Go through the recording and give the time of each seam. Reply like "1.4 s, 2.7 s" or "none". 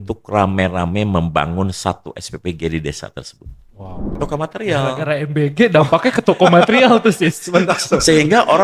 4.1 s